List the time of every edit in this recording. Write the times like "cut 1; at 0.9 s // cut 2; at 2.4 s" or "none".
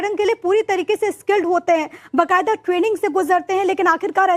none